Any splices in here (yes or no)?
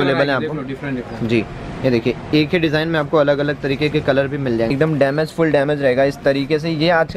yes